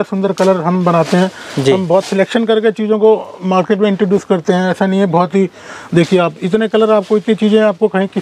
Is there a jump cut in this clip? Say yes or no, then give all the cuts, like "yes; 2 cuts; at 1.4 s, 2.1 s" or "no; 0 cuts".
no; 0 cuts